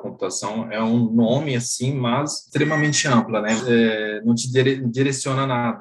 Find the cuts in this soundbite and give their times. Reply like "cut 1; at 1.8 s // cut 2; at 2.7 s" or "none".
cut 1; at 2.4 s // cut 2; at 3.6 s

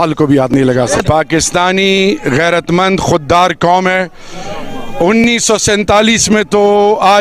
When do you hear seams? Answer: cut 1; at 1.0 s

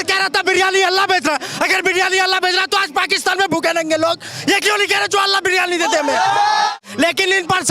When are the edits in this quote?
cut 1; at 6.7 s

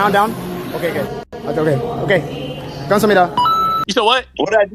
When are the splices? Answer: cut 1; at 3.7 s

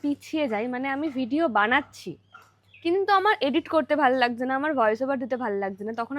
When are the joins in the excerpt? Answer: none

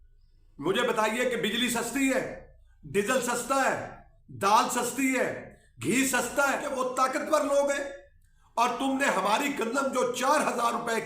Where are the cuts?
cut 1; at 6.7 s

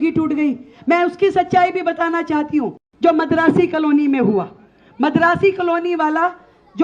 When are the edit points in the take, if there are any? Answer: cut 1; at 2.8 s

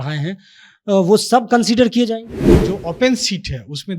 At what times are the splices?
cut 1; at 2.6 s

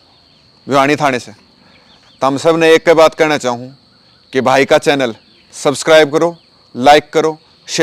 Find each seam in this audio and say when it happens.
none

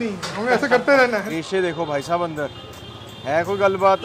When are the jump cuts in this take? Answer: cut 1; at 1.3 s

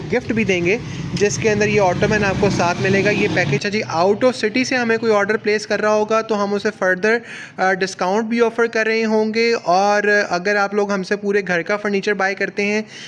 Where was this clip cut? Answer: cut 1; at 3.6 s

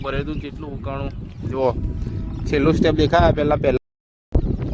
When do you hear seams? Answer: cut 1; at 3.8 s

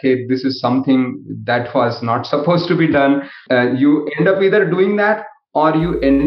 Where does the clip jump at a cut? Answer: cut 1; at 3.3 s

